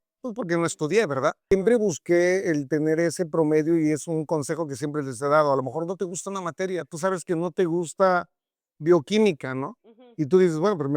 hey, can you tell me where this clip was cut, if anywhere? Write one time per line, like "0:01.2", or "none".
0:01.4